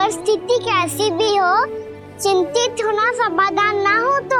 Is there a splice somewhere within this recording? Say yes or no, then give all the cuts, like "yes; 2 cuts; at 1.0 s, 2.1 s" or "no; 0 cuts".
no; 0 cuts